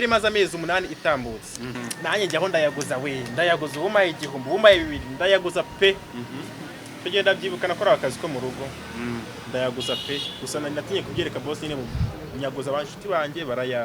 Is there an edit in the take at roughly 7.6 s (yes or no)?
no